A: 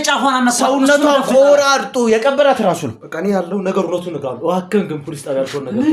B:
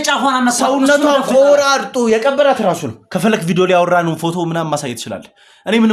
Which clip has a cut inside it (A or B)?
A